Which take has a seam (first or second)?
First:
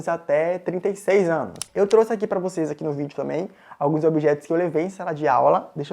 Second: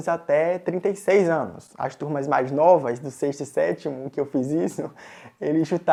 first